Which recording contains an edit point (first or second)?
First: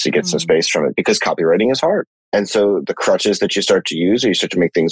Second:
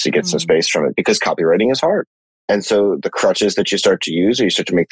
first